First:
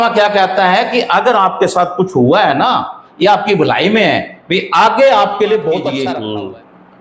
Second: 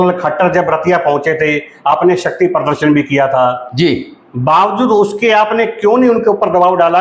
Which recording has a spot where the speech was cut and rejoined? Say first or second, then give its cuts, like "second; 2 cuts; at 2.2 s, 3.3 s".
first; 1 cut; at 6.0 s